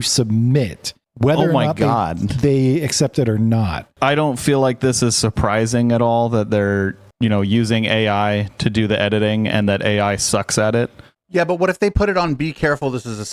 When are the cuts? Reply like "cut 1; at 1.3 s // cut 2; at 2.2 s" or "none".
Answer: cut 1; at 3.9 s // cut 2; at 11.1 s